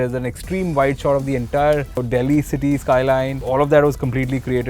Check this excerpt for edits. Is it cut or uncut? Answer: cut